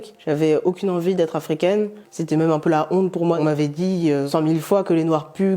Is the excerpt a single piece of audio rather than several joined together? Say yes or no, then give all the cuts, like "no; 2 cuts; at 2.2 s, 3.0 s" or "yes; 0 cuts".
no; 2 cuts; at 2.1 s, 3.4 s